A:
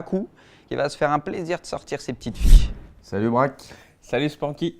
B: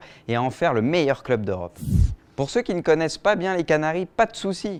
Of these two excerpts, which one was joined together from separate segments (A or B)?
A